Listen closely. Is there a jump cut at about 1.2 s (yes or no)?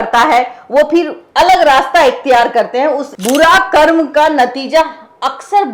no